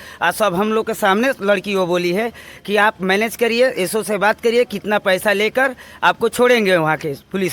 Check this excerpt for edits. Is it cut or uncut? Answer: uncut